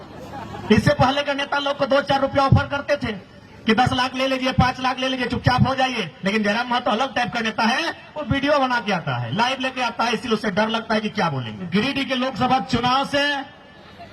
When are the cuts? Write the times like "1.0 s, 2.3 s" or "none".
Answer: 11.7 s